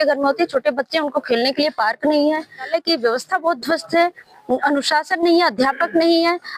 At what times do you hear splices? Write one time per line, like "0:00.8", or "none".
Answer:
0:02.7